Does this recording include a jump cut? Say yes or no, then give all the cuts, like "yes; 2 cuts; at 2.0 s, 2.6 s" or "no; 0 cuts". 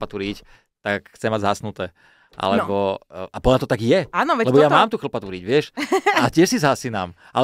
no; 0 cuts